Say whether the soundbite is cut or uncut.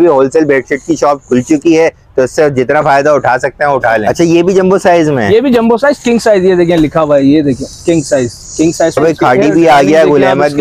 cut